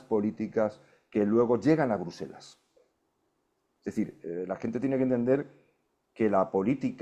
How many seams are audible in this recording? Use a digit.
0